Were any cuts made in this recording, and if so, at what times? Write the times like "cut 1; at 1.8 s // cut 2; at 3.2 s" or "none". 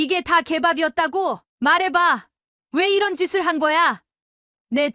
cut 1; at 1.5 s